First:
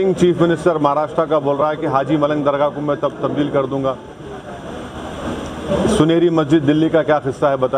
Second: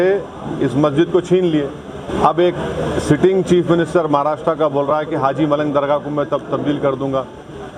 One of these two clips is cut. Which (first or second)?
second